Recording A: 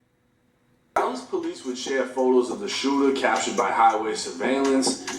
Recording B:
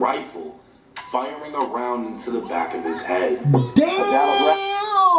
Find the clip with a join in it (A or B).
A